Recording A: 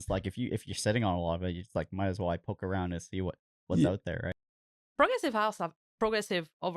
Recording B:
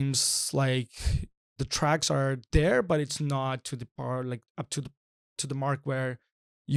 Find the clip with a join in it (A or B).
A